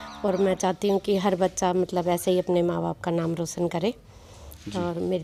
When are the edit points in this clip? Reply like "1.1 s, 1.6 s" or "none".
none